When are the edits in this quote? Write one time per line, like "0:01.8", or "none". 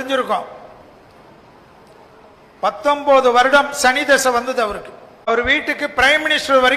0:05.3

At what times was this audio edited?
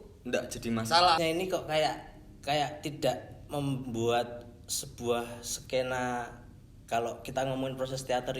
0:01.2

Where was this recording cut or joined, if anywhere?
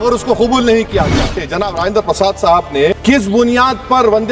0:01.4

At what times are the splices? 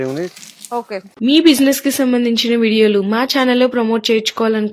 0:01.1

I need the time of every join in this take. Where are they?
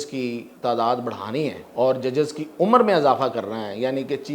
0:01.6

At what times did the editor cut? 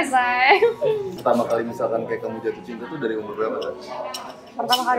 0:01.1

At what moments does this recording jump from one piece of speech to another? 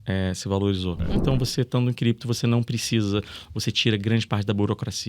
0:01.2

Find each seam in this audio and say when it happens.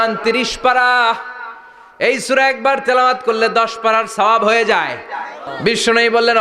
0:05.4

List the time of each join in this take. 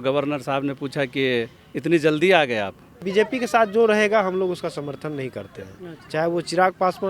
0:03.0

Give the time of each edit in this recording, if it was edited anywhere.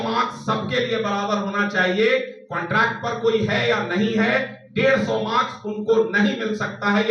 none

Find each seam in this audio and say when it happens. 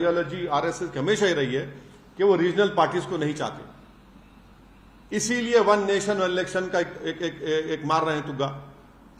none

